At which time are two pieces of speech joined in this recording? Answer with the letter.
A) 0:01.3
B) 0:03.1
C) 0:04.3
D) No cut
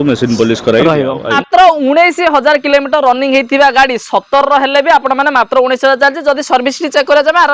A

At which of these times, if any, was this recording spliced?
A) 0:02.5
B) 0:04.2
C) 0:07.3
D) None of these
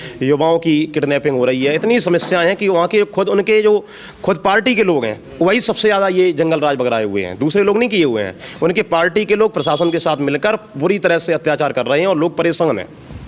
D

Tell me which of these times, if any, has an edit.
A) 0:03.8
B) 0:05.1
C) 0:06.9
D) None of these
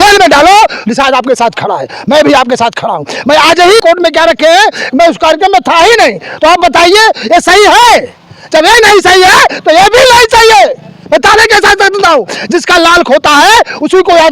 A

